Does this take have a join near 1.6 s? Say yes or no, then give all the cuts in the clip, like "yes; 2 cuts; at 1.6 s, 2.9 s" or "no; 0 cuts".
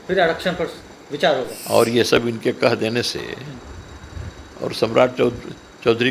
yes; 1 cut; at 1.6 s